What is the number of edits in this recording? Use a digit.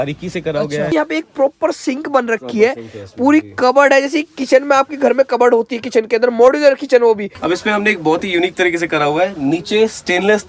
2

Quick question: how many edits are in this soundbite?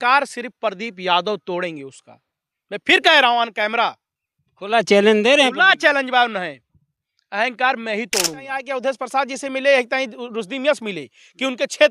1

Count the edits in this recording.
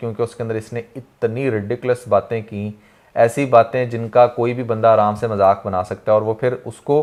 0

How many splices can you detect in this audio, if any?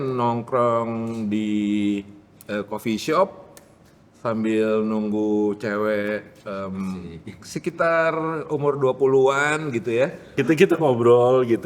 1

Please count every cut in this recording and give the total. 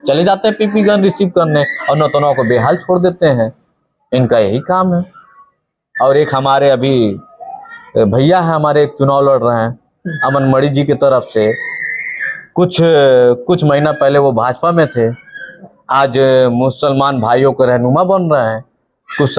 0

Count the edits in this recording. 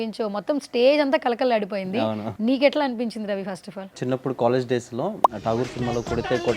2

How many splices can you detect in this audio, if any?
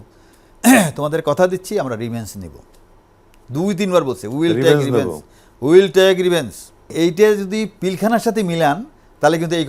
1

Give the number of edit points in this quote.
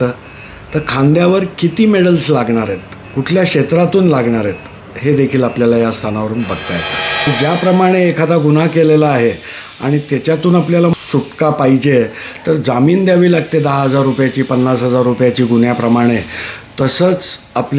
2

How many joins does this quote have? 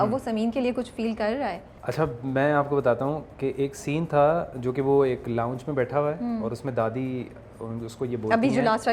0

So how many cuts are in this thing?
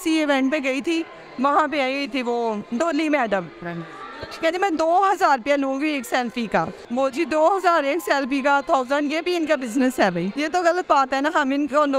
2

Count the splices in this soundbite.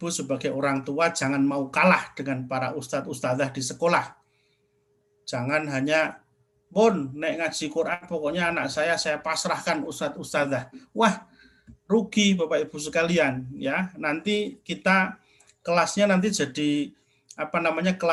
0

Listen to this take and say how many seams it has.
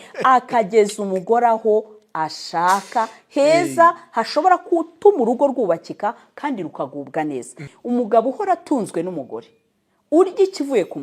1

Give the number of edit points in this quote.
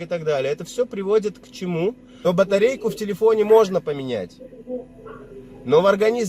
1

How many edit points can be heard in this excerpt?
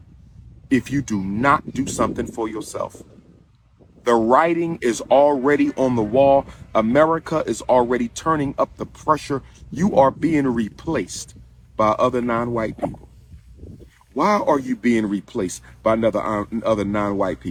0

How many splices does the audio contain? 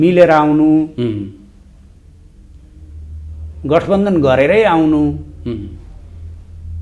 0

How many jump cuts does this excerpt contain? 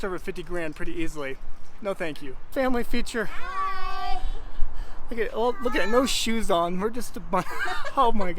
1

